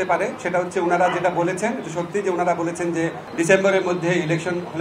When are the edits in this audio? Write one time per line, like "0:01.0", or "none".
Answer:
0:03.2